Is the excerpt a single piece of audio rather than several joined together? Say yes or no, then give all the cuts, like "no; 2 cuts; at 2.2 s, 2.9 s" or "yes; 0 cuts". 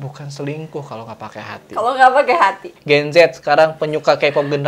no; 1 cut; at 2.7 s